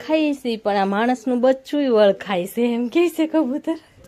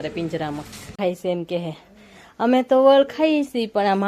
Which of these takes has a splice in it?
second; 1 cut; at 0.9 s

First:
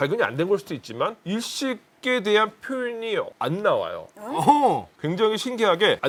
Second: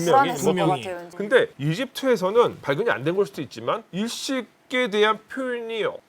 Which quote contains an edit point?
second; 1 cut; at 1.1 s

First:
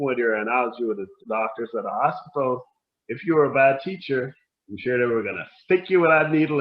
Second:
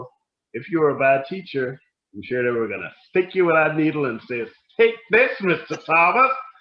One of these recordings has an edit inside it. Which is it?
first; 1 cut; at 1.2 s

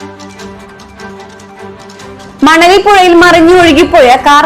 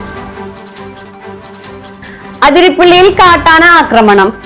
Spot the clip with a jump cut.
second; 1 cut; at 0.9 s

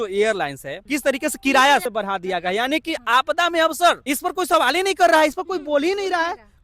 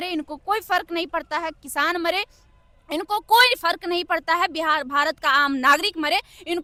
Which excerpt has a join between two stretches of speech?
first; 2 cuts; at 0.8 s, 1.9 s

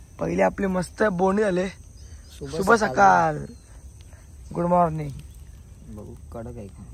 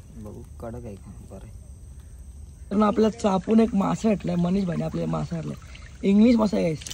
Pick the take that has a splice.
second; 1 cut; at 2.5 s

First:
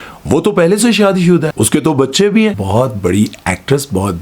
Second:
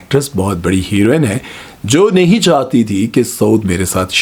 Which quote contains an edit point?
first; 2 cuts; at 1.6 s, 2.6 s

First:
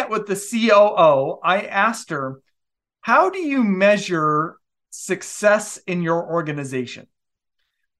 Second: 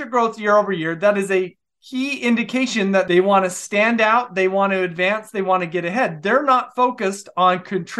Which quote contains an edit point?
second; 1 cut; at 3.1 s

